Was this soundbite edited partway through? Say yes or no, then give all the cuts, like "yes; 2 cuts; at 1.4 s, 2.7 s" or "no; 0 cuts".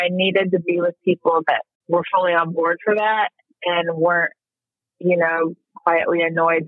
yes; 1 cut; at 1.7 s